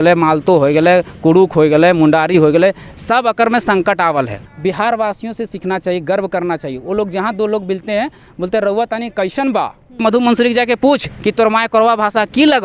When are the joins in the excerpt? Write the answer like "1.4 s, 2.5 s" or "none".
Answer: 4.4 s, 10.0 s